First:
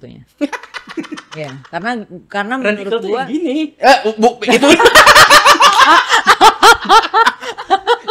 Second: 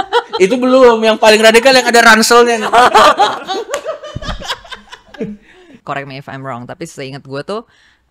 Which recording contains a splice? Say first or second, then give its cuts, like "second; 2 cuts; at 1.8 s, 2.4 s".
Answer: second; 1 cut; at 5.7 s